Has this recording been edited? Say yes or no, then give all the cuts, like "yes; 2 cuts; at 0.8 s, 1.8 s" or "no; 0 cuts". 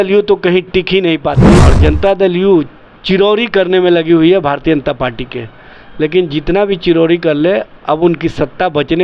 yes; 1 cut; at 1.6 s